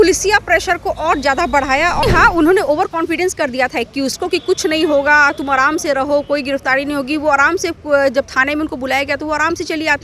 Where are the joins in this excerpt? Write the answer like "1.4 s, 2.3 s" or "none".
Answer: 2.0 s